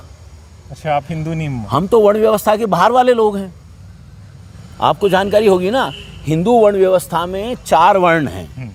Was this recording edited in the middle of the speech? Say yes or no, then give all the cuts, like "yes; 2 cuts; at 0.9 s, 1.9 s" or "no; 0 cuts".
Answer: no; 0 cuts